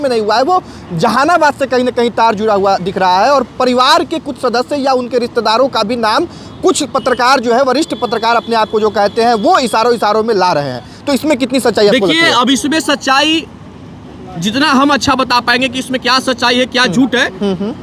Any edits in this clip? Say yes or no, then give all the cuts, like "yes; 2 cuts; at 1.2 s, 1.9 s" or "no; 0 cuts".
no; 0 cuts